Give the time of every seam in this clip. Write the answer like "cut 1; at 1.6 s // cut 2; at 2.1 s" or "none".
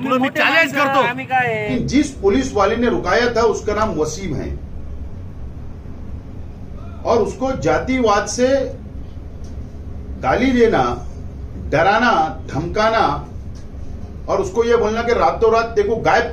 cut 1; at 1.7 s